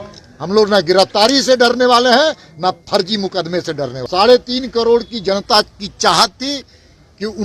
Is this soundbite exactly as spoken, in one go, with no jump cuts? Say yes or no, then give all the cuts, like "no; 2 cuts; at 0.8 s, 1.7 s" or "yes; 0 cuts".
no; 1 cut; at 4.0 s